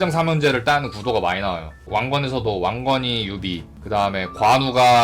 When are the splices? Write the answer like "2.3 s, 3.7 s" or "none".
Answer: 1.9 s